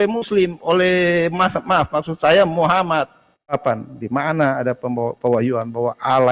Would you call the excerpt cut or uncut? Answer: cut